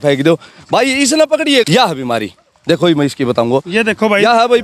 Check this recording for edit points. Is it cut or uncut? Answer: cut